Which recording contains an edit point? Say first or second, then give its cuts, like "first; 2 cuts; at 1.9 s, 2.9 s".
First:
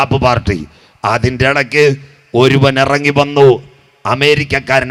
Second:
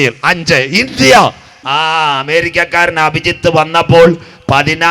second; 1 cut; at 1.6 s